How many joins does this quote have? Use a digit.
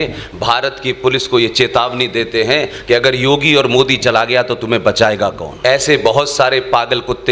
1